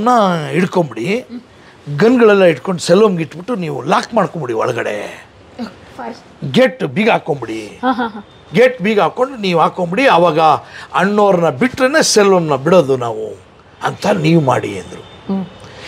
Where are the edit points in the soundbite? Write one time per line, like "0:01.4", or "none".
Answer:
none